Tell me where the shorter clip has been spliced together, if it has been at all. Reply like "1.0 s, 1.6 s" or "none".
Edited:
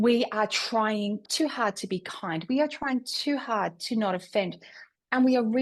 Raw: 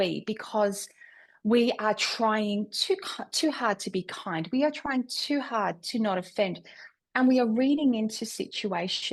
1.3 s

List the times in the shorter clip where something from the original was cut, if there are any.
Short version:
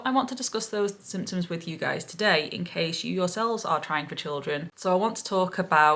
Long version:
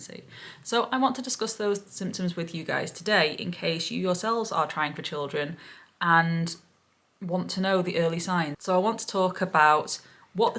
4.7 s

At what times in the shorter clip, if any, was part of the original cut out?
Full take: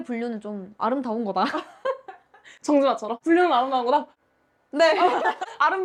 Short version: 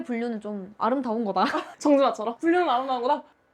1.7 s

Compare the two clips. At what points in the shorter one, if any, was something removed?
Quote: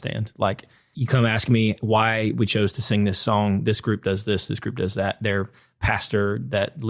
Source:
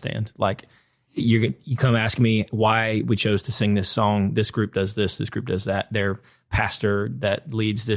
0.9 s

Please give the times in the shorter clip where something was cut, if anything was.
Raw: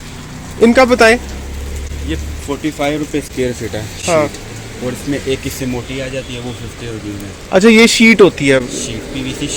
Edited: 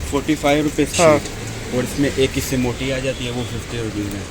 0.9 s

